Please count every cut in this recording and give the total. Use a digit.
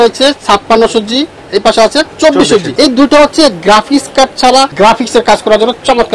2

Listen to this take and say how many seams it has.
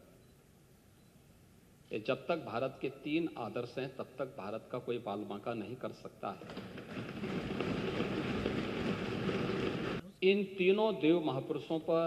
1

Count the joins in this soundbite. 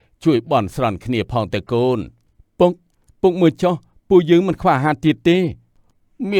0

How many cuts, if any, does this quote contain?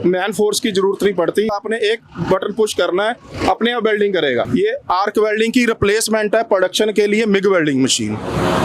2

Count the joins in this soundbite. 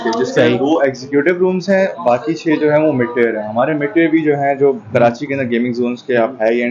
0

